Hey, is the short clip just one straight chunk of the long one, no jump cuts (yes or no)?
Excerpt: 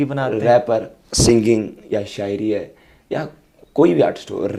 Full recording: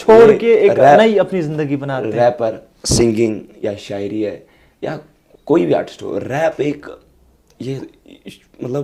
yes